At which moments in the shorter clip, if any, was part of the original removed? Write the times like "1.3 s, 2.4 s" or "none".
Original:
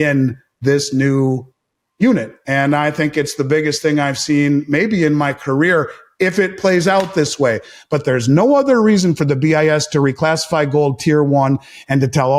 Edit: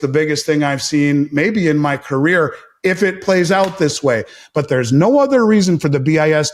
none